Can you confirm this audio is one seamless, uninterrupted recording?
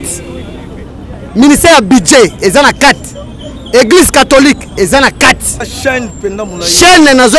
no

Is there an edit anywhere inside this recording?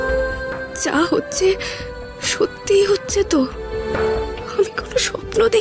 no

